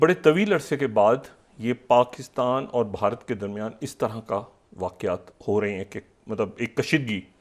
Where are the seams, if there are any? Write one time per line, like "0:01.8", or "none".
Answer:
none